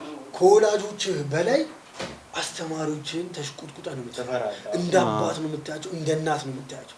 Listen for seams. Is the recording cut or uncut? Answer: uncut